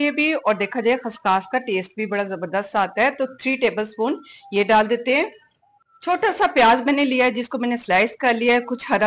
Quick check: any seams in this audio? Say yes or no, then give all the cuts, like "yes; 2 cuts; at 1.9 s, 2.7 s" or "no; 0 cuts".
no; 0 cuts